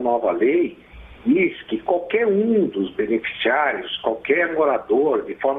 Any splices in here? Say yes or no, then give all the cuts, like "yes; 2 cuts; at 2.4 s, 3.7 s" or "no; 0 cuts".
no; 0 cuts